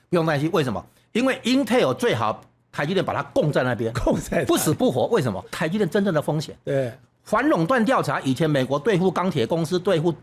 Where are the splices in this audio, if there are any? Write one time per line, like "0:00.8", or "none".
0:05.6